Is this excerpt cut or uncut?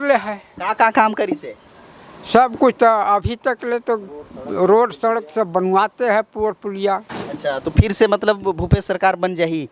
uncut